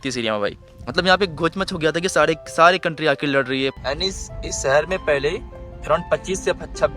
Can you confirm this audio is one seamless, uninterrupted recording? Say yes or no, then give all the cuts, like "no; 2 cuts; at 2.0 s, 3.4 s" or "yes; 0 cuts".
no; 1 cut; at 3.7 s